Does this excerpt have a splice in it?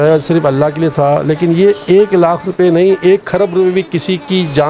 no; 0 cuts

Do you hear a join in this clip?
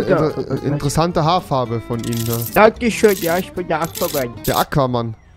no; 0 cuts

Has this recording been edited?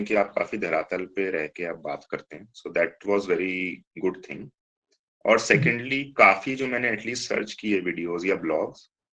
no; 0 cuts

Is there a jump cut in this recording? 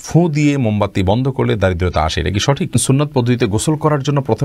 yes; 1 cut; at 2.8 s

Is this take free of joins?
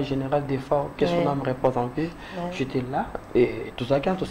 yes; 0 cuts

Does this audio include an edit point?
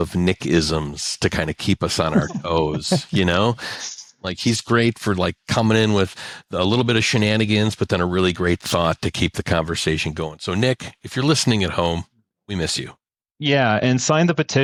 no; 0 cuts

